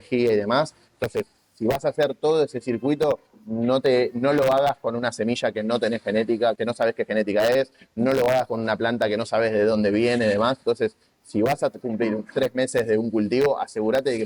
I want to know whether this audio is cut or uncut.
uncut